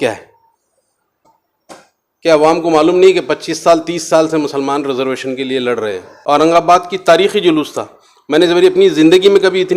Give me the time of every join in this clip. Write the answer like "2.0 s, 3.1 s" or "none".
1.4 s, 6.1 s